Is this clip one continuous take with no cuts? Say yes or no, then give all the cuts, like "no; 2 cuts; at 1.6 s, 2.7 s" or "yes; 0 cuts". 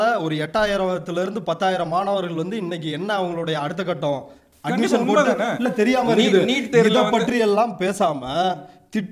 yes; 0 cuts